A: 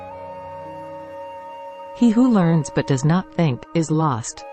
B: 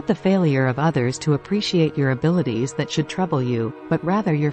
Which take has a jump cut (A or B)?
A